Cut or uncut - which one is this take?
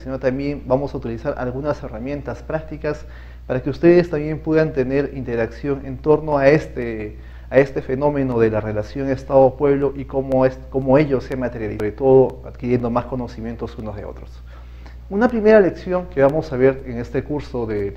uncut